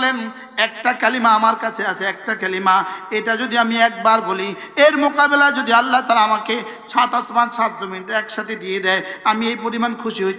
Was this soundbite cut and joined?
no; 0 cuts

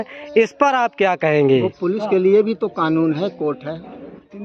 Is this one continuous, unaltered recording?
yes; 0 cuts

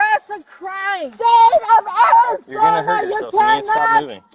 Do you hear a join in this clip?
yes; 1 cut; at 1.1 s

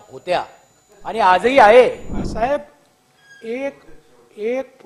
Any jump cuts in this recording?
yes; 1 cut; at 2.2 s

